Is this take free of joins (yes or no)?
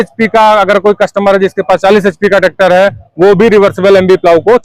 yes